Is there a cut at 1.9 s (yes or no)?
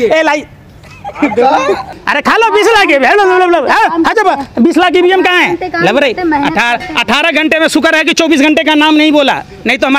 yes